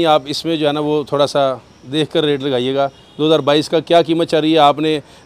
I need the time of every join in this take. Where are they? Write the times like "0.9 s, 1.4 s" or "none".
none